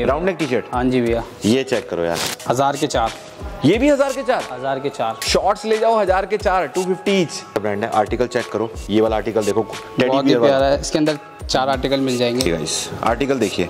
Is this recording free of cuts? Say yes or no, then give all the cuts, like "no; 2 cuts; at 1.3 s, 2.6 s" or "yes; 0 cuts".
no; 3 cuts; at 2.3 s, 7.6 s, 12.4 s